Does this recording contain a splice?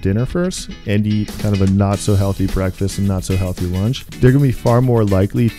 yes; 2 cuts; at 1.4 s, 4.1 s

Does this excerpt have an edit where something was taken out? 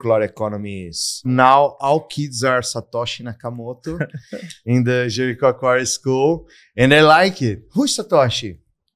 yes; 1 cut; at 1.3 s

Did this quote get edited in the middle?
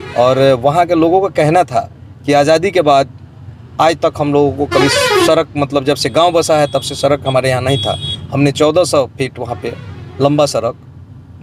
no; 0 cuts

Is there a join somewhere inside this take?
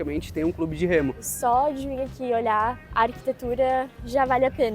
yes; 2 cuts; at 1.3 s, 2.8 s

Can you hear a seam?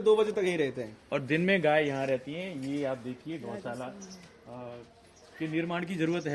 no; 0 cuts

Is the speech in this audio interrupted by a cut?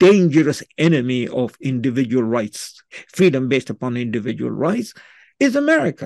yes; 1 cut; at 2.9 s

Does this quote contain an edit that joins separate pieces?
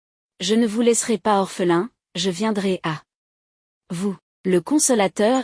yes; 1 cut; at 4.3 s

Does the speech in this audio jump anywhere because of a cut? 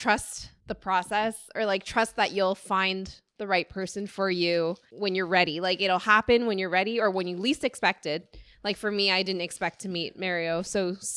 no; 0 cuts

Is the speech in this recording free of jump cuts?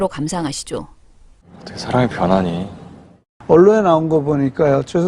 no; 1 cut; at 2.4 s

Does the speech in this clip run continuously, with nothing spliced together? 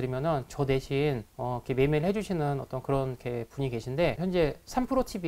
no; 2 cuts; at 1.3 s, 4.2 s

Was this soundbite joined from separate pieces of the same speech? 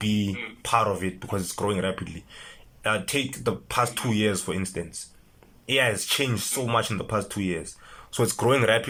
no; 0 cuts

